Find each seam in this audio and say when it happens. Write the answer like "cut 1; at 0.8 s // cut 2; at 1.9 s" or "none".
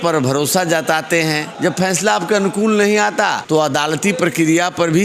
cut 1; at 1.5 s // cut 2; at 3.4 s